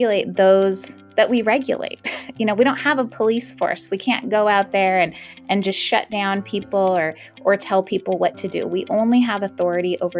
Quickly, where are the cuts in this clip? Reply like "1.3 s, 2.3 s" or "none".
none